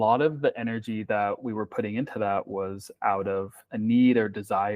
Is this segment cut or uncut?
cut